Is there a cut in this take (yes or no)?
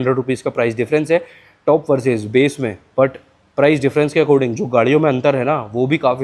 no